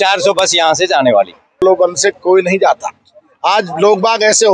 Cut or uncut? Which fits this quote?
cut